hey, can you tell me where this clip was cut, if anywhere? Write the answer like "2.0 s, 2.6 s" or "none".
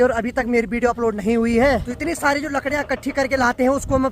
1.8 s